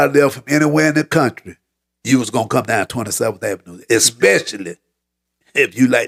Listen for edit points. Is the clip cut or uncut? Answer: uncut